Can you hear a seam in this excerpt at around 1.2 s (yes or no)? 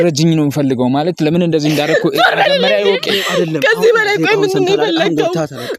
no